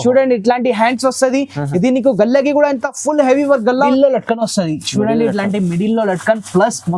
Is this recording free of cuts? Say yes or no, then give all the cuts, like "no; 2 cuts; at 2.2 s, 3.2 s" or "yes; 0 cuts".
no; 1 cut; at 3.9 s